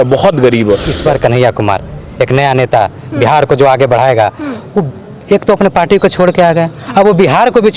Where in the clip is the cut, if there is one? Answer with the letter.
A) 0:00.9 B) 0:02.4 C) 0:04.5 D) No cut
A